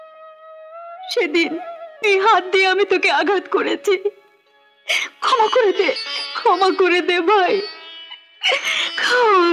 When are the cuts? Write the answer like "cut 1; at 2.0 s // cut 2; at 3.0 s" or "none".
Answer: none